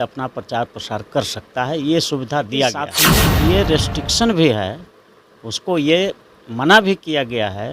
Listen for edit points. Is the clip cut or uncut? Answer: cut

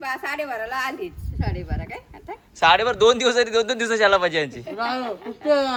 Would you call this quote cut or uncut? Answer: uncut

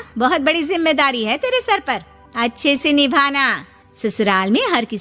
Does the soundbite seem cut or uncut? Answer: uncut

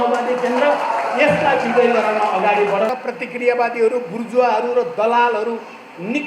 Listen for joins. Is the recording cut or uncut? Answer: cut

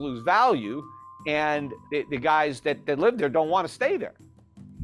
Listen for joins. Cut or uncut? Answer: cut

